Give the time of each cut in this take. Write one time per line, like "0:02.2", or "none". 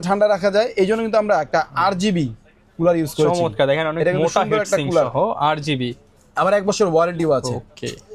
none